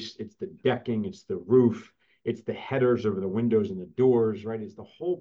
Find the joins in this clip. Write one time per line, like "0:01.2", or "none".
none